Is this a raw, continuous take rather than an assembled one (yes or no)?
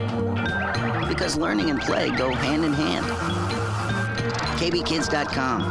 yes